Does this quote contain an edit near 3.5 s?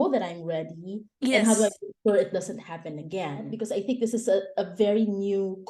yes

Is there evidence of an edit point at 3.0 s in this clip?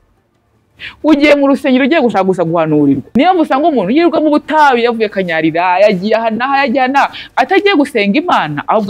yes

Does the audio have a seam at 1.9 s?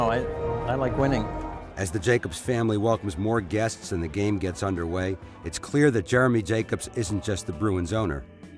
no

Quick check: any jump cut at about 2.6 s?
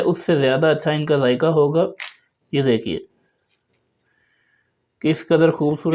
no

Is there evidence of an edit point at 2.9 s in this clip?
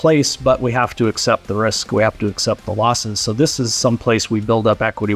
no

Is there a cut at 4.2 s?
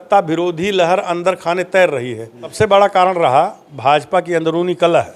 no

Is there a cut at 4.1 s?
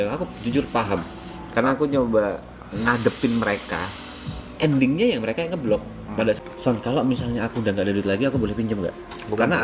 no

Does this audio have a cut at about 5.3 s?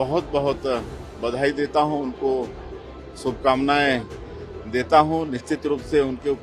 no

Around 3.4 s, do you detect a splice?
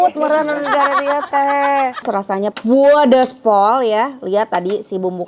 no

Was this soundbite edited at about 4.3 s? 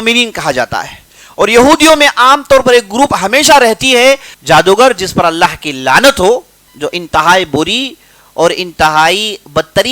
yes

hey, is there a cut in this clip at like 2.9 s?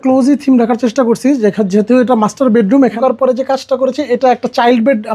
yes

